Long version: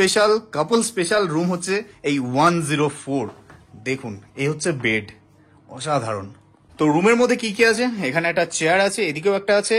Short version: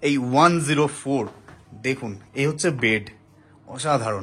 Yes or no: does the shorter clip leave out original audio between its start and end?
no